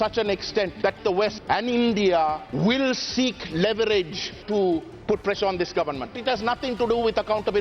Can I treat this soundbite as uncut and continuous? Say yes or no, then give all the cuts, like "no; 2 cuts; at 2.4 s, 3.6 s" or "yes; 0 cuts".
no; 3 cuts; at 1.0 s, 4.4 s, 6.1 s